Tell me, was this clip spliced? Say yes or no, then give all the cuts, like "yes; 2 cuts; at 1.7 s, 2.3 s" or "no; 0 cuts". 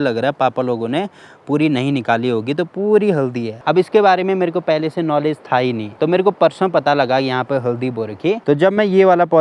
no; 0 cuts